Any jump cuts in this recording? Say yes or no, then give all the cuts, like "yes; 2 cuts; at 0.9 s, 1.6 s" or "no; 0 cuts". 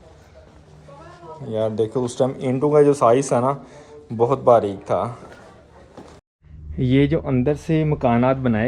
yes; 1 cut; at 6.3 s